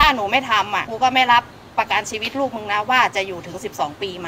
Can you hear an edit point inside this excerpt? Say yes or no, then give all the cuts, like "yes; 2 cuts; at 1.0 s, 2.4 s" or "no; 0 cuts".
no; 0 cuts